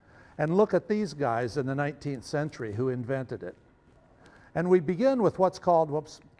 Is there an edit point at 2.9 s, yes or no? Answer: no